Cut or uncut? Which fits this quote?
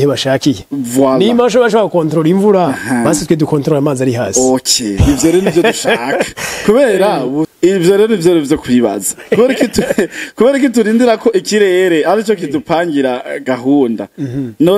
cut